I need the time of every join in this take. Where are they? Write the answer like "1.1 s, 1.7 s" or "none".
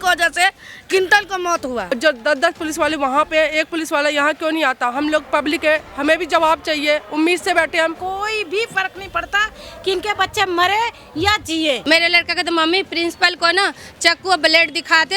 1.9 s, 8.0 s, 11.8 s